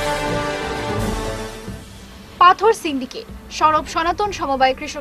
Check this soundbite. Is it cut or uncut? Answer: uncut